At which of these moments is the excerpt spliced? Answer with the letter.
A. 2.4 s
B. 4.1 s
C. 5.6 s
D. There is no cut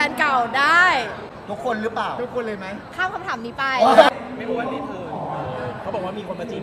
B